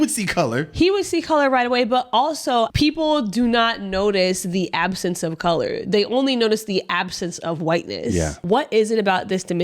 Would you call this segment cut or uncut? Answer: cut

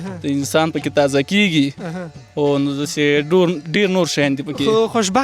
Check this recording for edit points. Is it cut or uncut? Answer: uncut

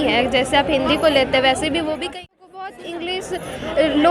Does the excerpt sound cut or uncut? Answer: cut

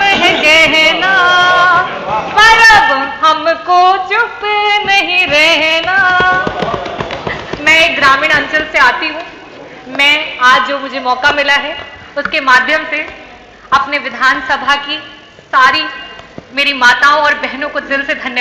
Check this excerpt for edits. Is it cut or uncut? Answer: uncut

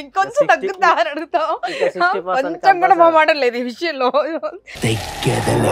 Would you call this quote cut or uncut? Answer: uncut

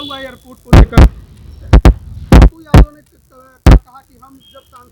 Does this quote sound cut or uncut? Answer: uncut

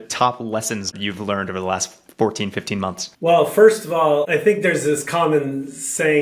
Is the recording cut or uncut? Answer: cut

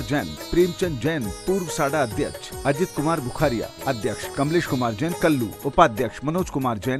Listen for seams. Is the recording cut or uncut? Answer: cut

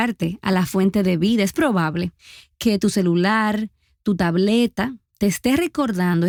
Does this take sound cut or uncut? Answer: uncut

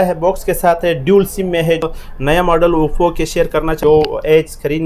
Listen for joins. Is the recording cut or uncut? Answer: cut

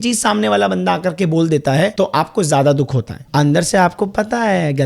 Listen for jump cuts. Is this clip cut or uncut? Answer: cut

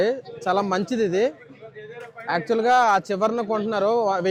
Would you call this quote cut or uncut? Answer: uncut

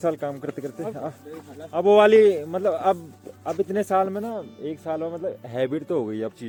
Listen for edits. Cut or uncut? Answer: uncut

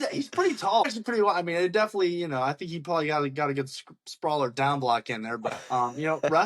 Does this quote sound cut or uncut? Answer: cut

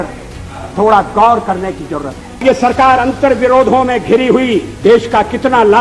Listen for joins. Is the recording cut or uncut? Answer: cut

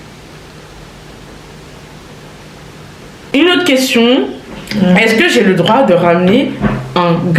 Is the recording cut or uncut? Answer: cut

